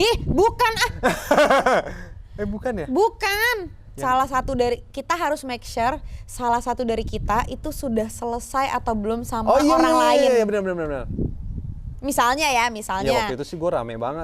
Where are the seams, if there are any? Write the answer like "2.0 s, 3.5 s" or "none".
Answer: none